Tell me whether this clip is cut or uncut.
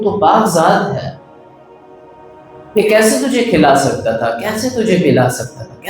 cut